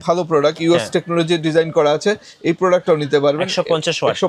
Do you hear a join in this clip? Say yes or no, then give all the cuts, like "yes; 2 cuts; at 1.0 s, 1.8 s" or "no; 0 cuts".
no; 0 cuts